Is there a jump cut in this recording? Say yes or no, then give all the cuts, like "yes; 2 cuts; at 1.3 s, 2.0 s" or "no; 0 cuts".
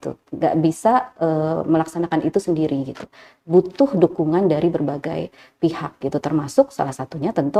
no; 0 cuts